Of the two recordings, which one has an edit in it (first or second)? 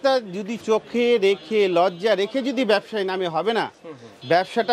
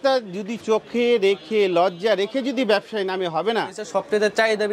second